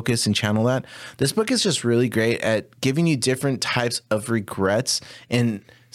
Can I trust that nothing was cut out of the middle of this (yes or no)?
yes